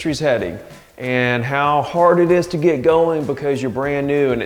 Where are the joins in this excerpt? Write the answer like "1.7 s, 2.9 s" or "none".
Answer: none